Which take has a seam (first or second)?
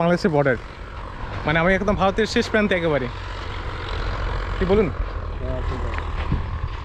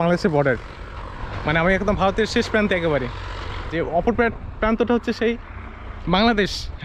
second